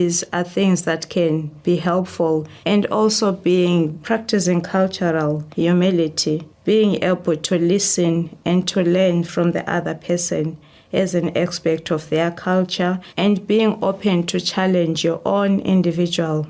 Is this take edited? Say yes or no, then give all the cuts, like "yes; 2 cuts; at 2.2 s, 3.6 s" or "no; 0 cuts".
yes; 6 cuts; at 1.5 s, 2.5 s, 4.0 s, 5.5 s, 6.5 s, 13.1 s